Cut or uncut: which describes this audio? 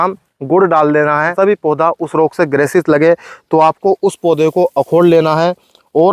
cut